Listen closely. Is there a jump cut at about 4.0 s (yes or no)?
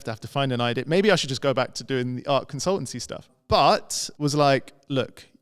yes